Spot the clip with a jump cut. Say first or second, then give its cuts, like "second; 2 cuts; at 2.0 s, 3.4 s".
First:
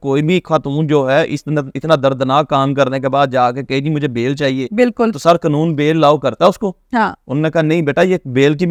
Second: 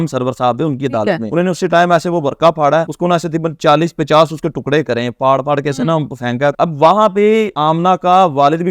second; 4 cuts; at 1.2 s, 2.9 s, 6.5 s, 7.5 s